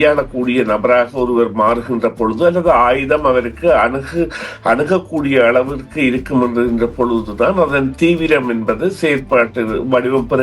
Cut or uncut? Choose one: uncut